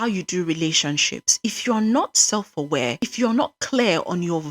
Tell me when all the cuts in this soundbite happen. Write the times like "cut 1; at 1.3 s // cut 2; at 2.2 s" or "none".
cut 1; at 3.0 s